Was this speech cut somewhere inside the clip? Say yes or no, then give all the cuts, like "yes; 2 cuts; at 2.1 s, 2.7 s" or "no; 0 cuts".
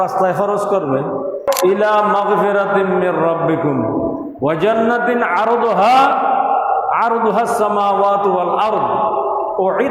yes; 1 cut; at 1.5 s